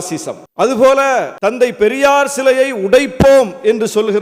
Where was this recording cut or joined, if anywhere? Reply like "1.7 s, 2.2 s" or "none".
1.3 s